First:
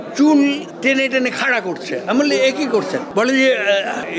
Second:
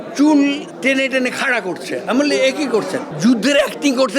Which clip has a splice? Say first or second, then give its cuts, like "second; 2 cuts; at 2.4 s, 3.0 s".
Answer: second; 1 cut; at 3.1 s